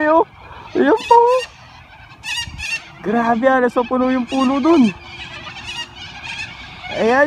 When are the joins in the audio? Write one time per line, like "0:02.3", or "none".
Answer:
none